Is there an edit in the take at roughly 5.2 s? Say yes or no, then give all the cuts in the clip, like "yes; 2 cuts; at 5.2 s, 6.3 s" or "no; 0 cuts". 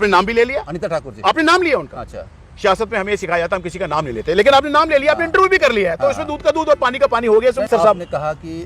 no; 1 cut; at 7.7 s